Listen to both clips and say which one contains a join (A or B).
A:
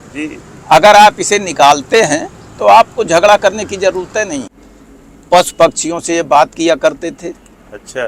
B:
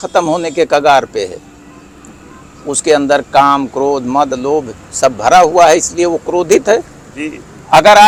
A